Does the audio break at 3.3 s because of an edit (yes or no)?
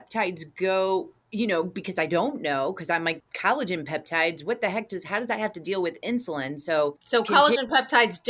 yes